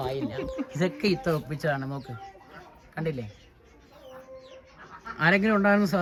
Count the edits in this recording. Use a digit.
0